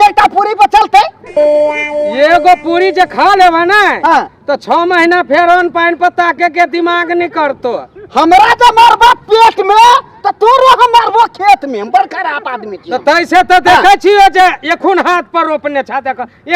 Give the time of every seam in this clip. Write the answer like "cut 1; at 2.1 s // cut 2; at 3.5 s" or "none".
cut 1; at 1.2 s // cut 2; at 2.1 s